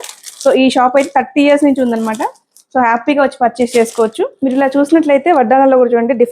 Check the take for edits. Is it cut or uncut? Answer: cut